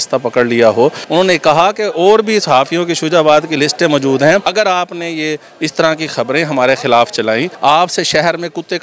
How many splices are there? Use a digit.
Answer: 3